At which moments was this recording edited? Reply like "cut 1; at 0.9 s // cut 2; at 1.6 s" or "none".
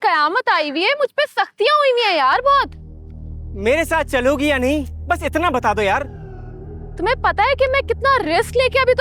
none